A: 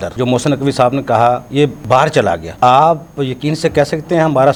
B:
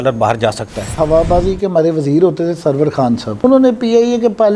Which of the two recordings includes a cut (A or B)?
B